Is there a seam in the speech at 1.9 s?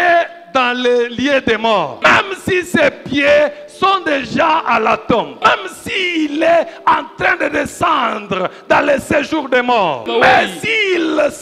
yes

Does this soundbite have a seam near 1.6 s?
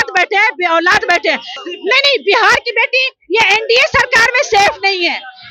yes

